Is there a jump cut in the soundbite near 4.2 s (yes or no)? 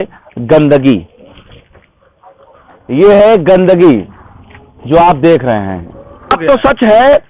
no